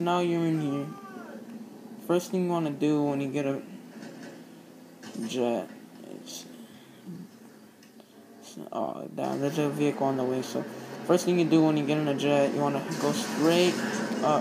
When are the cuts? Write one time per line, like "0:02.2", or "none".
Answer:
none